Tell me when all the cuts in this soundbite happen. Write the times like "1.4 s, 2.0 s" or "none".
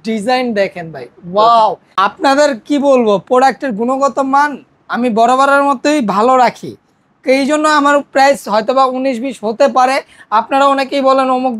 2.0 s